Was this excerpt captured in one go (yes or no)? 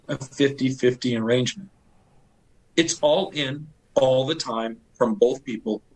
yes